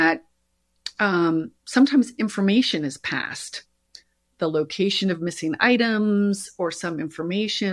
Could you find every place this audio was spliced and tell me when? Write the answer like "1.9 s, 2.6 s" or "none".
none